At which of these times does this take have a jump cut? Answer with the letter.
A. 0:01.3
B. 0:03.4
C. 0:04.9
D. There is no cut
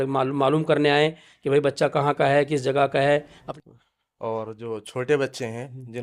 B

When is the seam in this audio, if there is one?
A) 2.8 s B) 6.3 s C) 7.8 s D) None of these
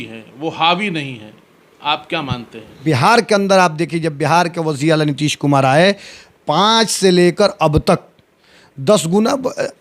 A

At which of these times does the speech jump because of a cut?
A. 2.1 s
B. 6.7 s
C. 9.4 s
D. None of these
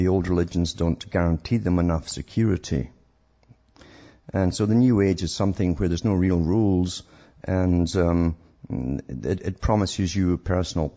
B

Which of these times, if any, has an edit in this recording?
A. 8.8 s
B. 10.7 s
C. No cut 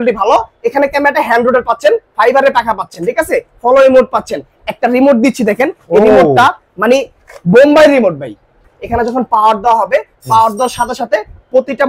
A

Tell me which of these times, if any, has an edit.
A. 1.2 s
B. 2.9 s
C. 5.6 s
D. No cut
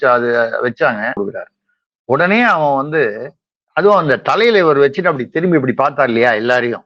A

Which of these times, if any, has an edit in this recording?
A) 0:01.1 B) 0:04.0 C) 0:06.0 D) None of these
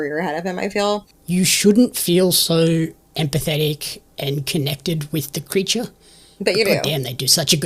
A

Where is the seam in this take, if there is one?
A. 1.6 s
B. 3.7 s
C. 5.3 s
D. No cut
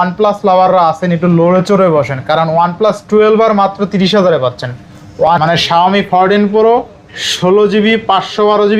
C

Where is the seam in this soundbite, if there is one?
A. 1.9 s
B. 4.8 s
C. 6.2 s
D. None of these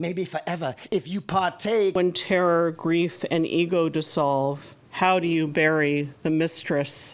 A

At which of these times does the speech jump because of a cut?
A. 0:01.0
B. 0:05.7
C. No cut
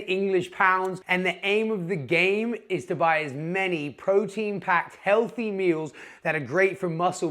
A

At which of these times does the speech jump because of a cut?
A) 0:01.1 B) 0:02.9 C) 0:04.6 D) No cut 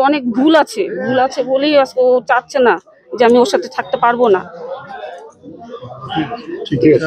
D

